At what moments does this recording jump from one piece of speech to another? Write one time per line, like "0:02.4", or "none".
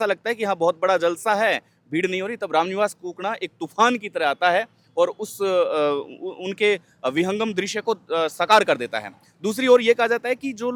none

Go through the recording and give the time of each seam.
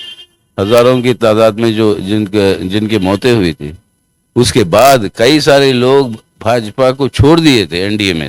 none

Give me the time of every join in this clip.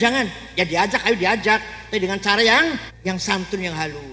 0:02.9

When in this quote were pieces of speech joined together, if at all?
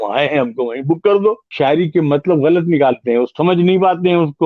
0:01.5

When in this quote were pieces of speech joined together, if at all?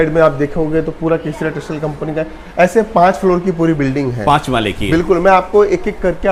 none

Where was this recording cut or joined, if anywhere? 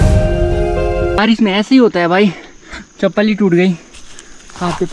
0:01.2

